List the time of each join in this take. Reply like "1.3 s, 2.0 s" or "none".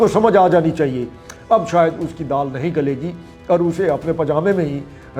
1.3 s